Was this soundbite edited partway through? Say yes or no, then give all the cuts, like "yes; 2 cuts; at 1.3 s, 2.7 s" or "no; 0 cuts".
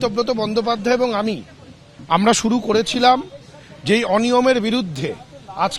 no; 0 cuts